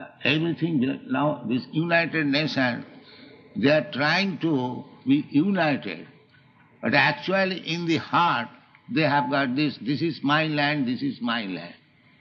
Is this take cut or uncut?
uncut